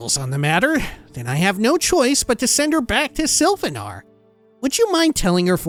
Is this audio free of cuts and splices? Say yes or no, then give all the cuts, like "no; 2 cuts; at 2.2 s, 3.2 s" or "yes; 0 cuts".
yes; 0 cuts